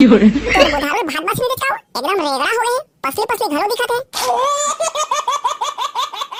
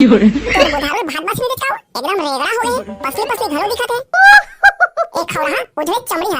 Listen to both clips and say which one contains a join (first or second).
second